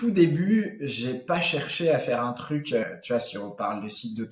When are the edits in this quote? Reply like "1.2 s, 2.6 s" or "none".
2.8 s

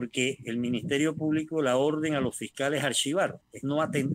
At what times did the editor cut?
none

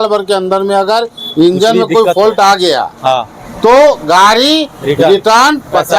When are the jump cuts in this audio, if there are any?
none

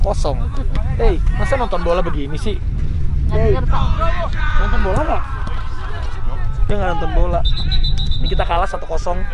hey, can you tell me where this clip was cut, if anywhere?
none

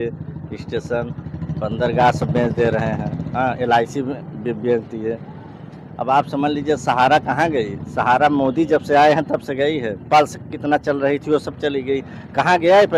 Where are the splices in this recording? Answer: none

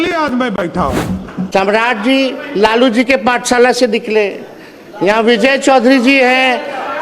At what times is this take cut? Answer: 1.4 s

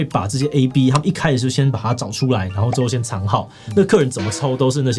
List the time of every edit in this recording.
none

